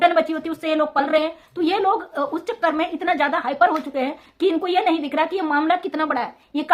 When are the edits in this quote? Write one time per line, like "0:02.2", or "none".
none